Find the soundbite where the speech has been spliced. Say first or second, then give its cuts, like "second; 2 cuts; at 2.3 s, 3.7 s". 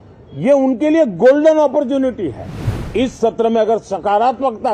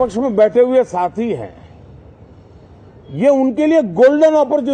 first; 1 cut; at 3.0 s